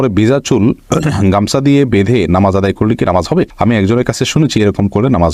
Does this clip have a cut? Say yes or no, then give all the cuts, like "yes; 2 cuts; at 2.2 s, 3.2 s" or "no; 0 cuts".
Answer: no; 0 cuts